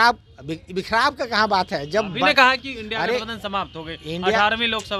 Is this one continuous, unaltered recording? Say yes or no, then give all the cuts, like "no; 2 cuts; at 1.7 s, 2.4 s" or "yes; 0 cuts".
yes; 0 cuts